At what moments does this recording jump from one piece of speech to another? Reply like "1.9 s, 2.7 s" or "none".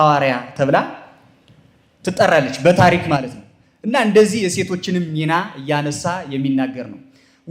none